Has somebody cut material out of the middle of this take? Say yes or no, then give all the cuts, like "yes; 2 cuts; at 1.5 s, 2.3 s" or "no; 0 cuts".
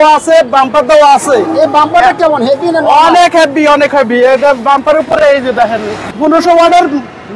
yes; 1 cut; at 6.1 s